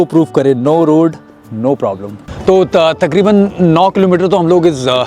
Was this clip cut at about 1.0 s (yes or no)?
no